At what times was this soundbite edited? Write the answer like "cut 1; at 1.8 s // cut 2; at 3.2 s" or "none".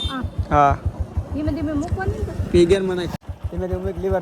cut 1; at 3.1 s